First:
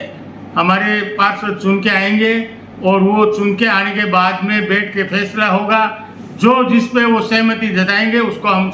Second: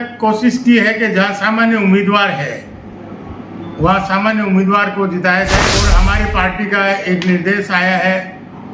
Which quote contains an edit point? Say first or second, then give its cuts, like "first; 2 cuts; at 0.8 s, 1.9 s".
second; 1 cut; at 5.9 s